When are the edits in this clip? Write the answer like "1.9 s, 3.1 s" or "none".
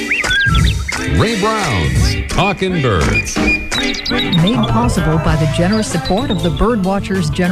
none